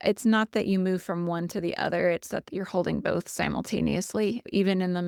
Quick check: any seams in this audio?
no; 0 cuts

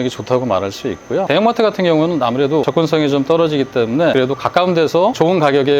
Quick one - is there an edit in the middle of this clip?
yes; 2 cuts; at 2.7 s, 4.1 s

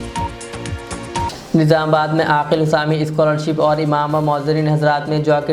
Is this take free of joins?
no; 1 cut; at 1.3 s

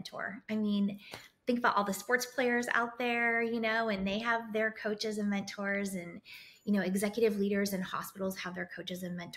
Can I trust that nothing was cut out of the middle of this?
yes; 0 cuts

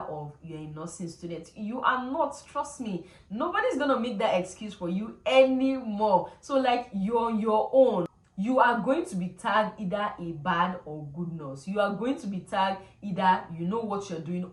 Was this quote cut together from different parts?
no; 0 cuts

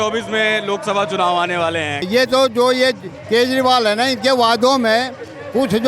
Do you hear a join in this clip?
yes; 1 cut; at 2.1 s

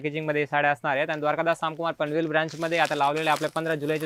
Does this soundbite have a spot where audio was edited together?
no; 0 cuts

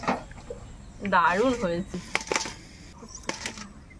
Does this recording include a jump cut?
yes; 2 cuts; at 1.9 s, 3.0 s

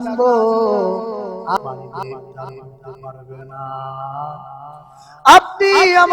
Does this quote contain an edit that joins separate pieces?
yes; 1 cut; at 1.6 s

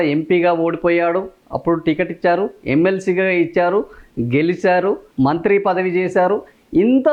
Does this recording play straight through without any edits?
yes; 0 cuts

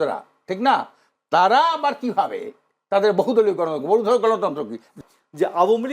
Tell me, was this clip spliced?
yes; 1 cut; at 4.9 s

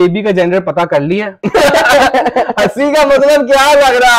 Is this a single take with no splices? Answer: yes; 0 cuts

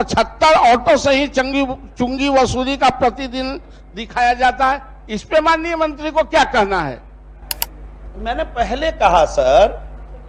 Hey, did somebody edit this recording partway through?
no; 0 cuts

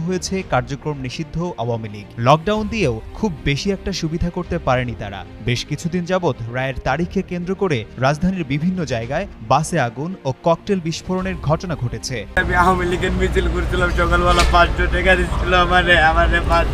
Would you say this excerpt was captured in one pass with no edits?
no; 1 cut; at 12.4 s

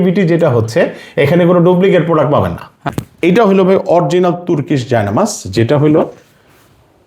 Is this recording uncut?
no; 1 cut; at 2.8 s

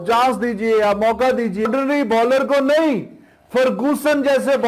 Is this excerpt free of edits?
no; 1 cut; at 1.7 s

